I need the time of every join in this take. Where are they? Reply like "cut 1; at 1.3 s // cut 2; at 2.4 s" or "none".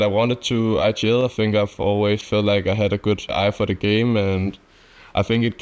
cut 1; at 3.3 s